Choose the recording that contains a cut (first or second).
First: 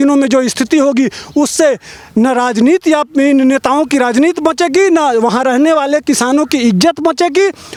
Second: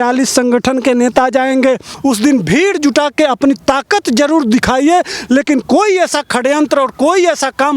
second